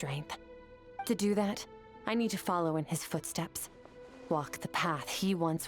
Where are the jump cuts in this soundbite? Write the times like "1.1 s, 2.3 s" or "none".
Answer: 1.0 s